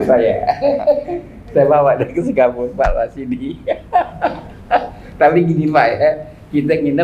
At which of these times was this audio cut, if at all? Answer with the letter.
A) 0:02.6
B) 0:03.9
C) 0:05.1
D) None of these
D